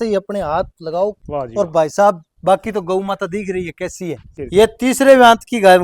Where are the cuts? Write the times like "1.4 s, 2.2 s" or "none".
1.2 s, 4.3 s